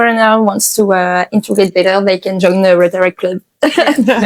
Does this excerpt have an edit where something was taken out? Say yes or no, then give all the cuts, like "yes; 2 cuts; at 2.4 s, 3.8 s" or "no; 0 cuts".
no; 0 cuts